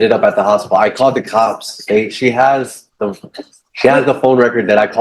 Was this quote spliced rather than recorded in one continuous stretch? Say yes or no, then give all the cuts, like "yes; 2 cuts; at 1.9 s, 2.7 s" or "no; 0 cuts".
no; 0 cuts